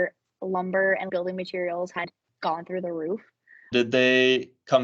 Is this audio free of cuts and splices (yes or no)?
no